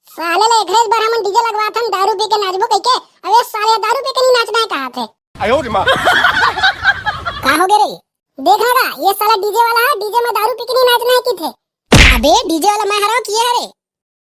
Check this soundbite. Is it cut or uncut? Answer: uncut